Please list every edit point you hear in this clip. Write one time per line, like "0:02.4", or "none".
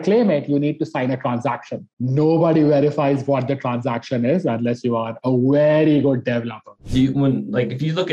0:06.8